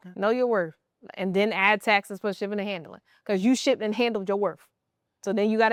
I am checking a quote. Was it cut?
no; 0 cuts

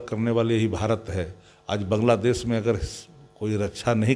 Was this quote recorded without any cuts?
yes; 0 cuts

